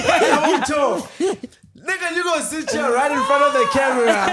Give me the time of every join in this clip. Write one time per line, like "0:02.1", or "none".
none